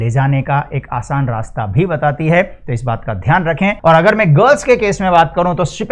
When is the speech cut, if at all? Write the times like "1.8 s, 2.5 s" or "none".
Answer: 3.8 s